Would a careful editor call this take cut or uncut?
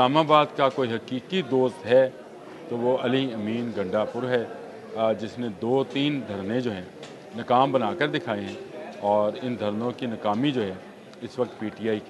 uncut